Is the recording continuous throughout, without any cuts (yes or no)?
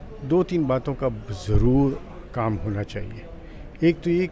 yes